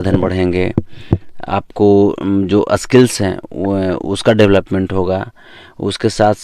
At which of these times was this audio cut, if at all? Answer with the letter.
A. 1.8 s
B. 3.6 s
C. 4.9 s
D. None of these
D